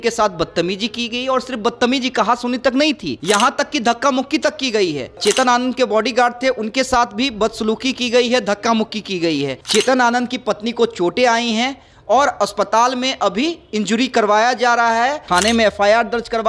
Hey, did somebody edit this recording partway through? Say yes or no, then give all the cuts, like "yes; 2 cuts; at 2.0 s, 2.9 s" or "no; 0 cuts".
yes; 4 cuts; at 3.1 s, 5.2 s, 9.6 s, 15.2 s